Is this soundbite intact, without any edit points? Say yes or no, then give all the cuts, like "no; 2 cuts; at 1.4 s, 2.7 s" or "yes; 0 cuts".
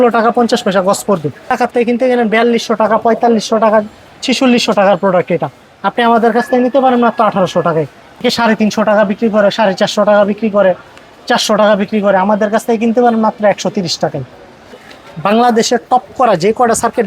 no; 3 cuts; at 1.5 s, 8.2 s, 14.8 s